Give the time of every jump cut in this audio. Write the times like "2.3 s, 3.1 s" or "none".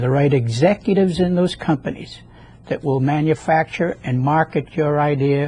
3.0 s